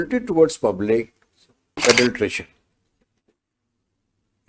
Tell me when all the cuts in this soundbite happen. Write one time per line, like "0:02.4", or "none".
0:01.8